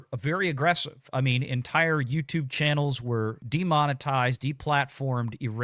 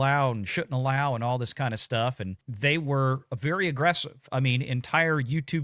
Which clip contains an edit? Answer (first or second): first